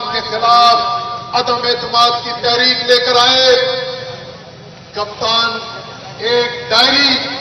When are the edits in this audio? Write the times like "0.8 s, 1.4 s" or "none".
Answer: none